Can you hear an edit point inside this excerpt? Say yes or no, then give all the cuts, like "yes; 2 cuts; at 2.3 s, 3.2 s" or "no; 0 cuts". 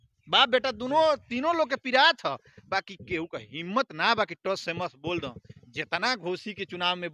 no; 0 cuts